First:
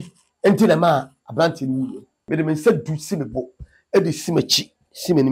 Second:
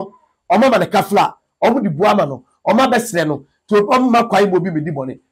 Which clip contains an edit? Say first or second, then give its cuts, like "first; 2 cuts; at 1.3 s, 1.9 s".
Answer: first; 1 cut; at 2.3 s